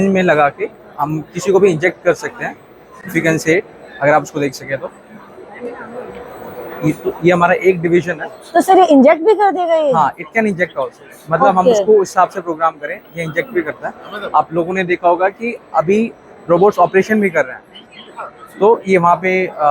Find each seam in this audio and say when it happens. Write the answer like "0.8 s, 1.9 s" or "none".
none